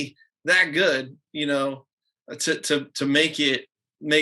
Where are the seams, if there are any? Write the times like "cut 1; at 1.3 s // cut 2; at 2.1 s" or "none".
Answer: none

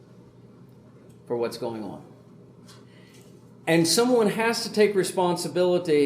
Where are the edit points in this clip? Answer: cut 1; at 2.9 s

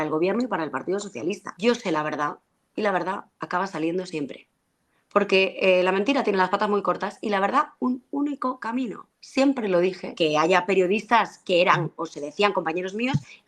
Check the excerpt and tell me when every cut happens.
cut 1; at 1.5 s // cut 2; at 10.1 s

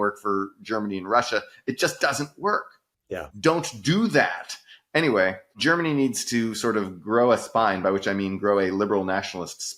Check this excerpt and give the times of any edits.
none

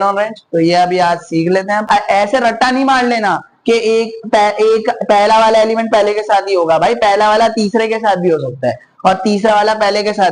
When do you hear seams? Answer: cut 1; at 1.9 s

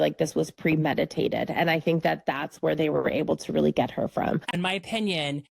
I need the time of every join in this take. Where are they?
cut 1; at 4.5 s

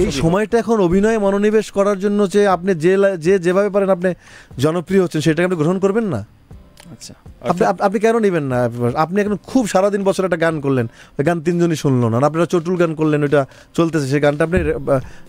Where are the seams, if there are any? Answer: none

